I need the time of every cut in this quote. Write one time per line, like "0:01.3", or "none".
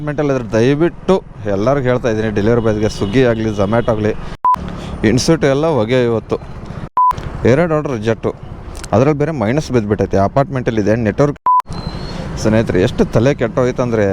0:04.3
0:06.8
0:11.4